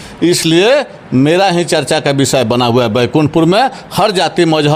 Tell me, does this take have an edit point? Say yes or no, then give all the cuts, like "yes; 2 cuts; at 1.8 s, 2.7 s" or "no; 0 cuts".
no; 0 cuts